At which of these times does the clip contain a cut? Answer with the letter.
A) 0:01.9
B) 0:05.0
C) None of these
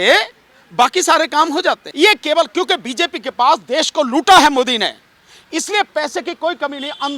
A